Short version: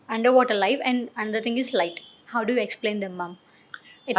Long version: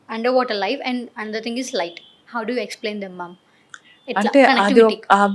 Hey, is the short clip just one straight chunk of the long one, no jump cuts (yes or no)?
yes